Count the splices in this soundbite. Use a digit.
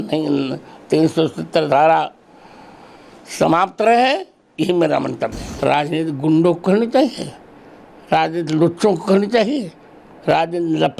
1